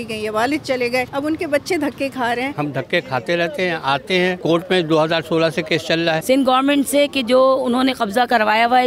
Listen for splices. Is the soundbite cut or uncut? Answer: cut